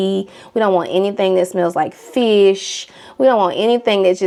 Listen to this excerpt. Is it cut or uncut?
uncut